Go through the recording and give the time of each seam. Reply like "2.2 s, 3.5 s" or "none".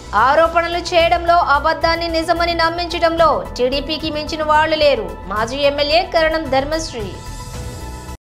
none